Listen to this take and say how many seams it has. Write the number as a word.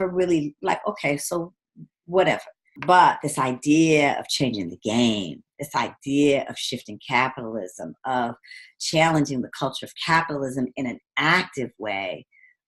one